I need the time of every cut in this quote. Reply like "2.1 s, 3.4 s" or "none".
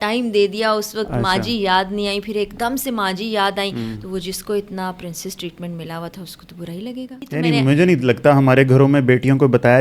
7.3 s